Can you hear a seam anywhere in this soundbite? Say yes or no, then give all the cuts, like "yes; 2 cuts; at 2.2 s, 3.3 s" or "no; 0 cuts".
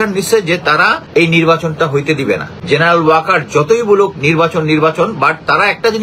yes; 2 cuts; at 1.0 s, 2.5 s